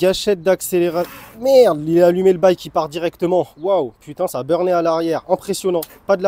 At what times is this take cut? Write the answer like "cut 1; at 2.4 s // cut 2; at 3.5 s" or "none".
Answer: none